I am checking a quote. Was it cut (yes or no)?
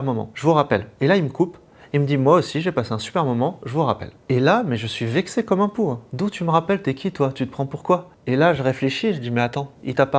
yes